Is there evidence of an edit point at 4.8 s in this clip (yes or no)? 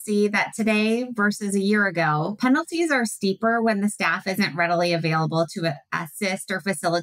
no